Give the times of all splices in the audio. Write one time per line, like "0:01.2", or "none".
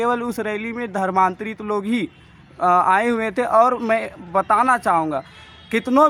none

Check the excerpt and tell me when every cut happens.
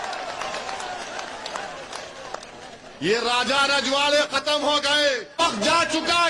0:05.4

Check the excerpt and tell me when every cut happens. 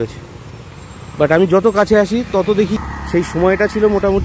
0:02.8

